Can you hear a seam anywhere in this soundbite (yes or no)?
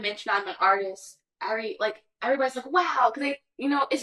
no